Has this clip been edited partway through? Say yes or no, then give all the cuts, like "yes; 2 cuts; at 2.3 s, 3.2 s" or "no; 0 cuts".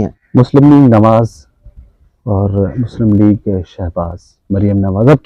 no; 0 cuts